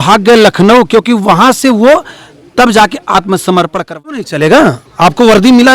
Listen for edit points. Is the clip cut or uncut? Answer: cut